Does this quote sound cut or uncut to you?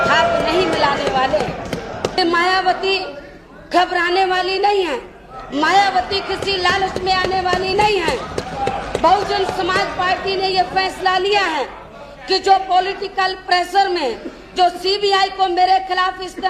cut